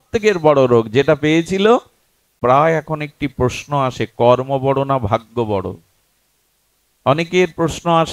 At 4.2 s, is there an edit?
no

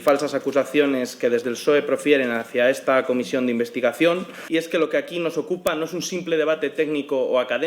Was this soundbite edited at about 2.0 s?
no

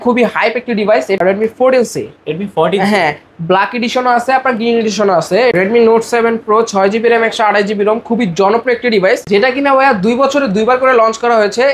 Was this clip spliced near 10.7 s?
no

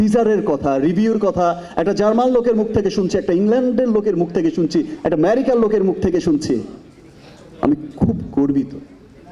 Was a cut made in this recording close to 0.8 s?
no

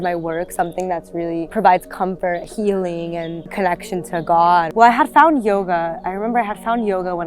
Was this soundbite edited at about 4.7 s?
yes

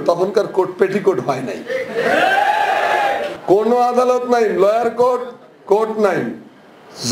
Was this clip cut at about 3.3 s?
yes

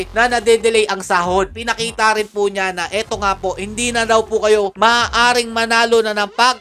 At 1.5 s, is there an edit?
yes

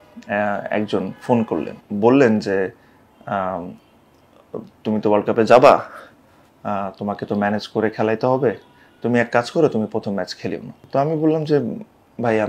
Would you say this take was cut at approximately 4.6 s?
no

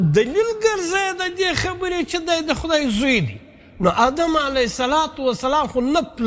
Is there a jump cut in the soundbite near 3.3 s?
no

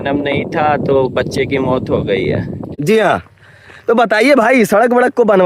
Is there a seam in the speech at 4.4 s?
no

